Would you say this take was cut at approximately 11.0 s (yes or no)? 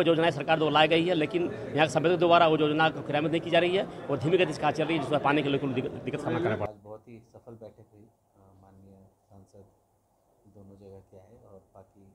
no